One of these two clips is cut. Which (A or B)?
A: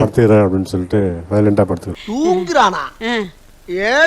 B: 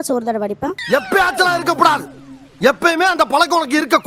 A